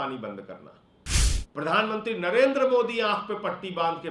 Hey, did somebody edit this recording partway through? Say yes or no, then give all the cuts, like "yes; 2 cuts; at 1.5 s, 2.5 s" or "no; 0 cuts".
yes; 1 cut; at 1.4 s